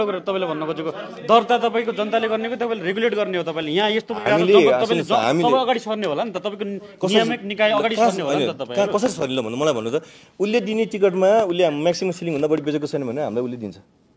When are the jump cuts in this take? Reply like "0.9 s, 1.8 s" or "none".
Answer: none